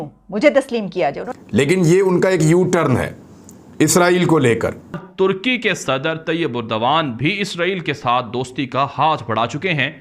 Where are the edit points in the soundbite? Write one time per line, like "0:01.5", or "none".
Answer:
0:01.2
0:05.0